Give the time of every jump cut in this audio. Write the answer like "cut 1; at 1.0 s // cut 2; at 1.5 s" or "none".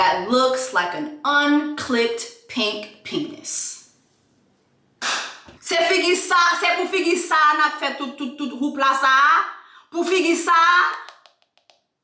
cut 1; at 5.5 s